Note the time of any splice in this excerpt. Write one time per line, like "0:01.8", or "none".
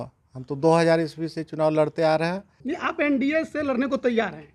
0:02.6